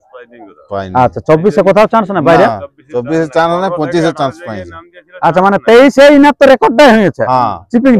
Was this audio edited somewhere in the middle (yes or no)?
no